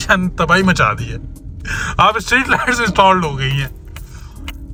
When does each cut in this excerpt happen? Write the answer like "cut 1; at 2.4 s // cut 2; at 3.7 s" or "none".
none